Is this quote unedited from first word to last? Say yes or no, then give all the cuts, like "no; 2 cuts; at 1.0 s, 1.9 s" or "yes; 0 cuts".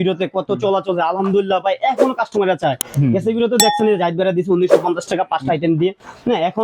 yes; 0 cuts